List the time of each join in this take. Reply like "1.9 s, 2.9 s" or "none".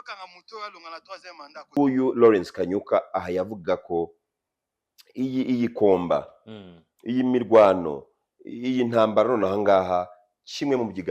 1.7 s

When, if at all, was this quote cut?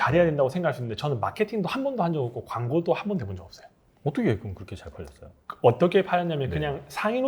none

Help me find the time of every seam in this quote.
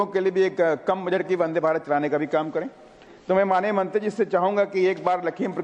3.1 s

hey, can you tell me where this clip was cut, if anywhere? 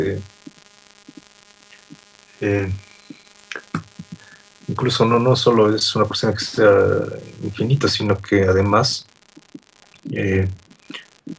9.0 s

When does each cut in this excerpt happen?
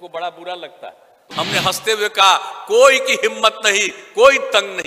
1.2 s

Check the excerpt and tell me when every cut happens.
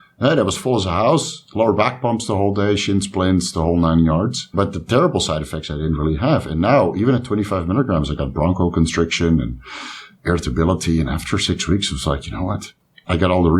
4.5 s

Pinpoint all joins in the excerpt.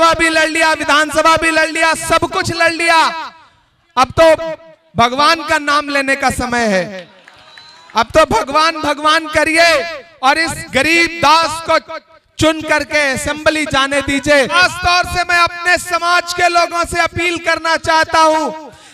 14.5 s

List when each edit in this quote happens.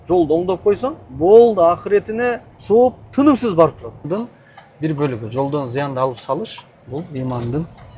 4.0 s

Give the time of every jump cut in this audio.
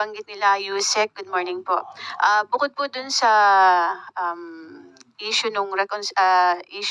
none

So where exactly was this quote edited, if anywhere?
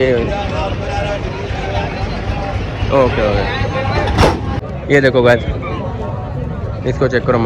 4.6 s

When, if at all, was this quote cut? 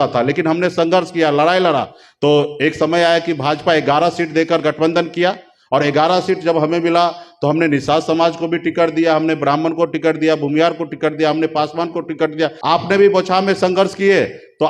12.6 s

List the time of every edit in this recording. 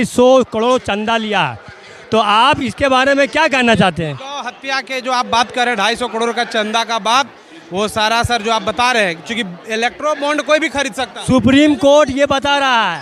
none

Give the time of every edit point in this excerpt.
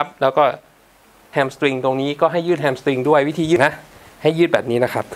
1.2 s, 3.6 s

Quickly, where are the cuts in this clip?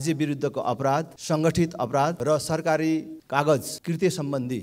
1.1 s, 2.2 s, 3.2 s, 3.7 s

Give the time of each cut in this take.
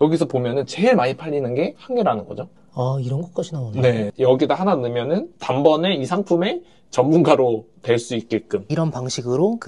4.1 s, 8.7 s

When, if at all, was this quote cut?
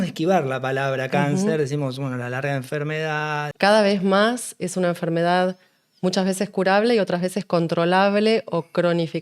3.5 s

